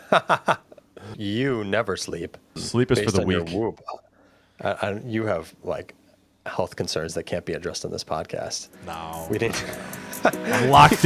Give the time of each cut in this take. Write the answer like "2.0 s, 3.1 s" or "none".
1.1 s, 2.6 s

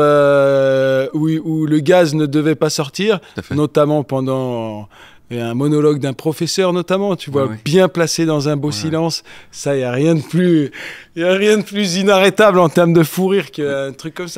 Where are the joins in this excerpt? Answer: none

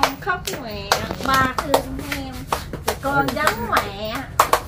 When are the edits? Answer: none

